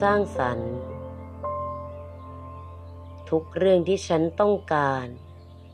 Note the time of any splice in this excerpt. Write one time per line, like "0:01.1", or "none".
none